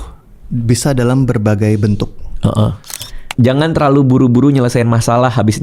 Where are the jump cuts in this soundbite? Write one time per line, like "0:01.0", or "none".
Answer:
0:03.1